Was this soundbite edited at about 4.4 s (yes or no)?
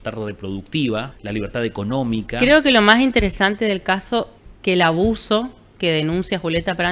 yes